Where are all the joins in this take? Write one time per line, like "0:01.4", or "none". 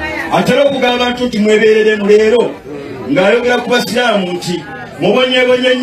0:00.9